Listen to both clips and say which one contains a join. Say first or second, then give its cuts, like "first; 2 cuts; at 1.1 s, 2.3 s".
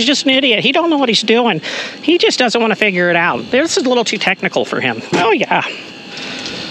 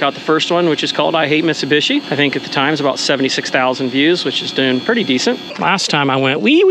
second; 1 cut; at 5.5 s